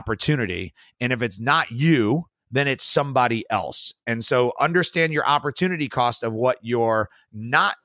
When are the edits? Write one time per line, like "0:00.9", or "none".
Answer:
none